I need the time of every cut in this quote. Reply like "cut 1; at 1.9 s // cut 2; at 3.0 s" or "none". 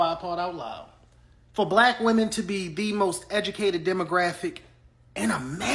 none